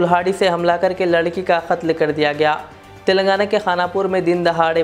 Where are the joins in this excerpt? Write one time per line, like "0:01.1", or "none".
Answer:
none